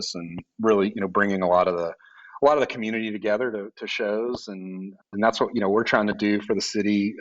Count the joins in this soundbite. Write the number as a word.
one